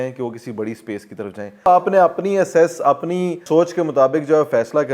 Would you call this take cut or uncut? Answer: cut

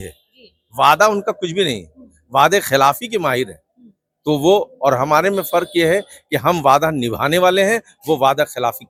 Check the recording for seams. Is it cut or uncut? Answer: uncut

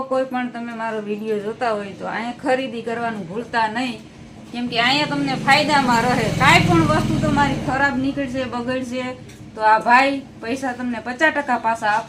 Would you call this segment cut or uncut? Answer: uncut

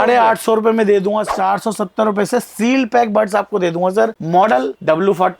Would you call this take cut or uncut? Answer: cut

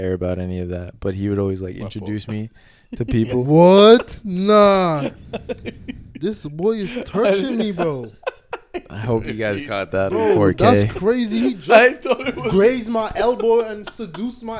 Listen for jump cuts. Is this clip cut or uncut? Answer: uncut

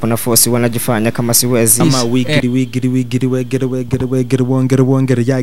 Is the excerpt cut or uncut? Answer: cut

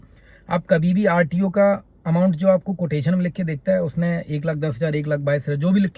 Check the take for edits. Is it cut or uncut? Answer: uncut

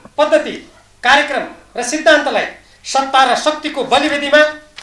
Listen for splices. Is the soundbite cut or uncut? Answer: uncut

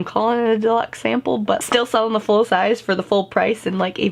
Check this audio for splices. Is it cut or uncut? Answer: cut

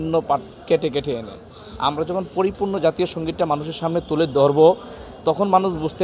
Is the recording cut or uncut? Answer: uncut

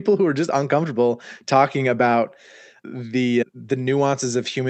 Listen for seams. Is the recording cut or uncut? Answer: uncut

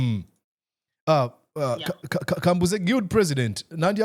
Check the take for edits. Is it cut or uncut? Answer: uncut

